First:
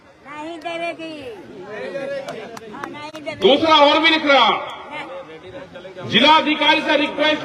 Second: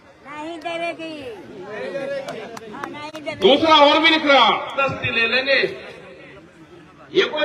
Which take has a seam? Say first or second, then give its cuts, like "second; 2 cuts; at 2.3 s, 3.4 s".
second; 1 cut; at 4.8 s